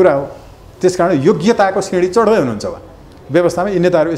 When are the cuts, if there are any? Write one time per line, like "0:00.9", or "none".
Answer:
none